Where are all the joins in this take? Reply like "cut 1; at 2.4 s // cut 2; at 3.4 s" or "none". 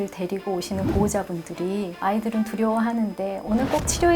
cut 1; at 2.0 s